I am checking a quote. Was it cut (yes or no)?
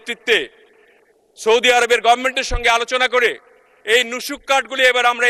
no